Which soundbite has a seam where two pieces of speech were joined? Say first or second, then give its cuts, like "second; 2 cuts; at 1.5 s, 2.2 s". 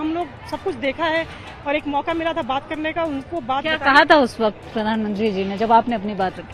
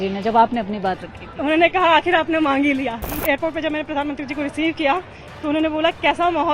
second; 1 cut; at 3.1 s